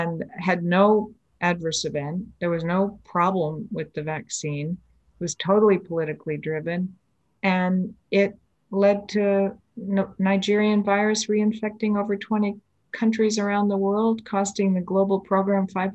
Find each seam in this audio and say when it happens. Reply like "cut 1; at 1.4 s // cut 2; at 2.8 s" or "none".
none